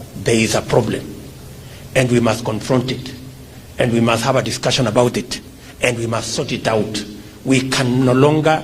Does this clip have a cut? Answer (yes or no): no